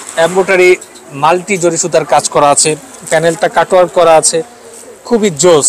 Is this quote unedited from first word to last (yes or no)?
yes